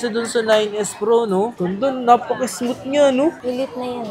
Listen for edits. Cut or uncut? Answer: cut